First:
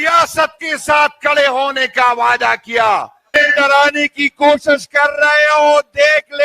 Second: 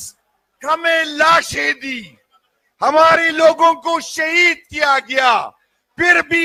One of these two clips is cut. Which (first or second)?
first